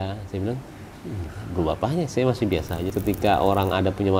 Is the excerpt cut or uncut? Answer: cut